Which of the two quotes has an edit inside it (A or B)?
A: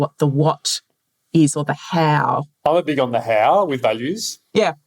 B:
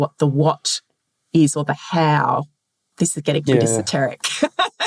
A